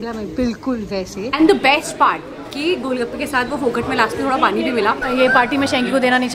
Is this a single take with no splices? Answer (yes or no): no